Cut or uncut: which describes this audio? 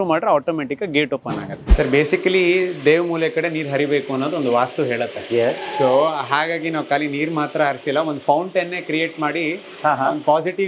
cut